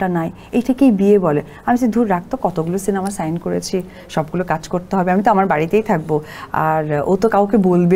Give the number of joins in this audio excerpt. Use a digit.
0